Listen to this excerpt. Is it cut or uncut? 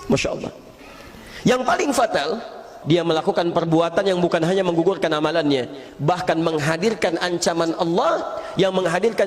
cut